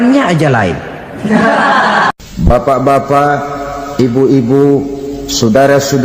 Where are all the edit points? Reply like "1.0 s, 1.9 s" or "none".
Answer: 2.1 s